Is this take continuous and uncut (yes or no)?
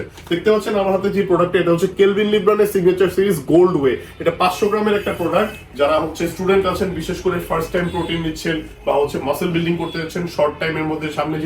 yes